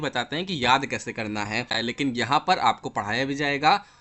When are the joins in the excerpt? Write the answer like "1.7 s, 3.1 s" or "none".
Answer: 1.7 s